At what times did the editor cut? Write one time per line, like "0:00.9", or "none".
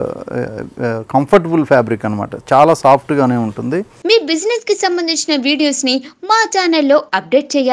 0:03.9